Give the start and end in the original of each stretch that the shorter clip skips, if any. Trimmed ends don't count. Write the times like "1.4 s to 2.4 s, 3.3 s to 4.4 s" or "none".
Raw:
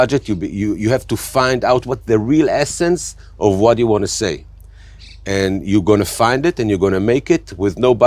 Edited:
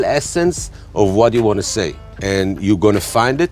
4.5 s to 5.1 s